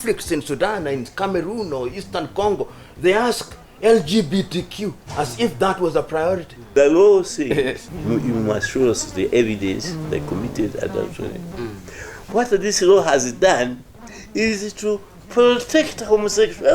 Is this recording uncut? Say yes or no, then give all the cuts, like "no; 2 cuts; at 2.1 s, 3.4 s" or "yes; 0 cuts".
no; 2 cuts; at 6.6 s, 7.9 s